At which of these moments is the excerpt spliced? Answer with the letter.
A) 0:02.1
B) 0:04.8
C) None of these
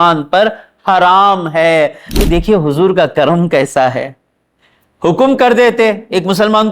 A